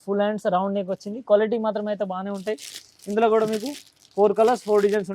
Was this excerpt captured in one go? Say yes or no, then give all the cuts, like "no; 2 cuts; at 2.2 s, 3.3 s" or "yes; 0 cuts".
yes; 0 cuts